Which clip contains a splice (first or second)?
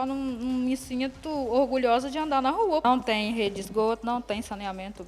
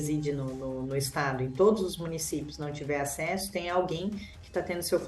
first